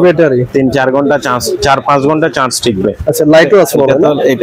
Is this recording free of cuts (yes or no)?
yes